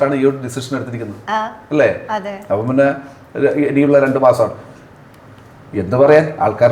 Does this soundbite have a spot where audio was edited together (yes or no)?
no